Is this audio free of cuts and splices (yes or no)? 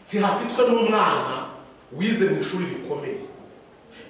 yes